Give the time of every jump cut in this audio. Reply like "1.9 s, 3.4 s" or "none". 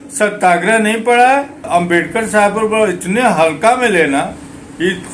1.7 s